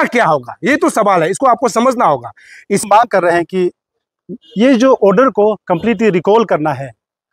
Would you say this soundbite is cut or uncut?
cut